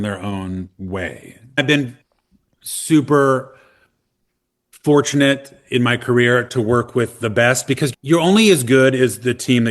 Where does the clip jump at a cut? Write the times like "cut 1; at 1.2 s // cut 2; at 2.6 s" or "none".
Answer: cut 1; at 1.6 s